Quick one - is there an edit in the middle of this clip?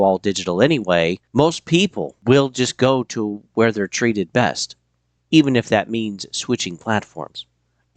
yes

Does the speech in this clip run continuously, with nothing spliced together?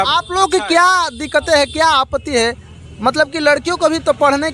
yes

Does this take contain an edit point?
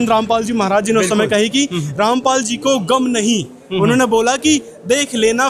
no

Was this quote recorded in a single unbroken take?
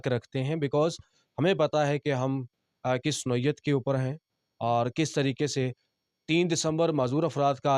yes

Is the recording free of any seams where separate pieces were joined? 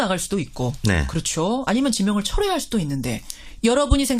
no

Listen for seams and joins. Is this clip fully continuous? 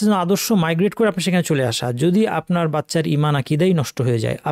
yes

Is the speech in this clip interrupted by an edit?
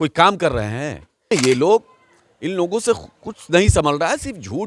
yes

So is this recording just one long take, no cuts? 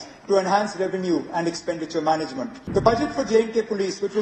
no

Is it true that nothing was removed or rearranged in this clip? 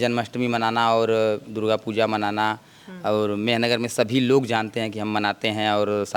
yes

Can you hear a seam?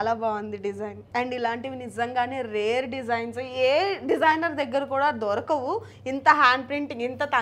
yes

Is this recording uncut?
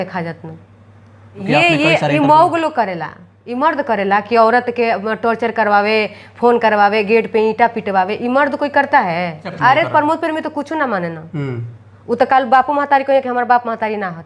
no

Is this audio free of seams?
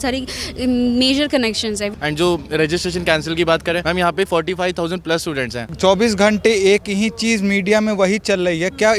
no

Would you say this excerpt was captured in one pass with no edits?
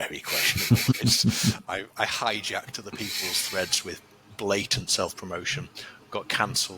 no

